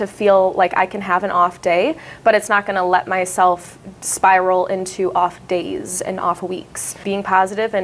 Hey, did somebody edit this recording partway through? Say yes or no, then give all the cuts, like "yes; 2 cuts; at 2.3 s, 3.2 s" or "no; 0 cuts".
yes; 1 cut; at 6.9 s